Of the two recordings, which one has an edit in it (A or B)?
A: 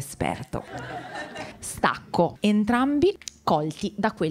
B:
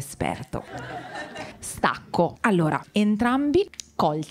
A